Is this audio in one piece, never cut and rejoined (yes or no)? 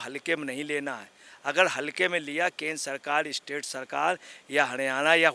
yes